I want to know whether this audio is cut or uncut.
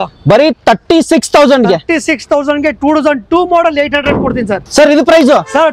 uncut